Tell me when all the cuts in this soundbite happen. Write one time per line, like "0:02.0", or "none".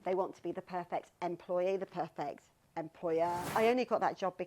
0:03.4